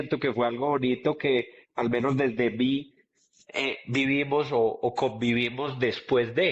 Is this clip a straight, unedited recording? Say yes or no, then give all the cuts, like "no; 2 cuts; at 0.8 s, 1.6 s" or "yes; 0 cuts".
yes; 0 cuts